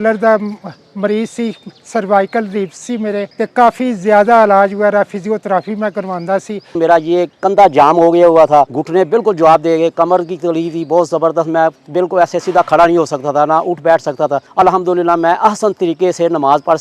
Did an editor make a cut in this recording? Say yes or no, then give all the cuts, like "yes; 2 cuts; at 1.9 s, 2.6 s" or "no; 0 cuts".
yes; 4 cuts; at 3.3 s, 6.8 s, 8.8 s, 14.4 s